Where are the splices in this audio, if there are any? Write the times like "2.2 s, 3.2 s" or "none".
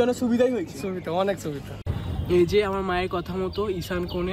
1.7 s